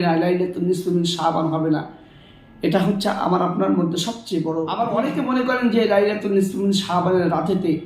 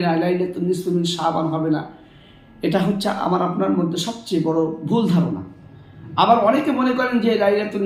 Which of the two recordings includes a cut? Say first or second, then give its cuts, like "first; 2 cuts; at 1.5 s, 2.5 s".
first; 1 cut; at 4.8 s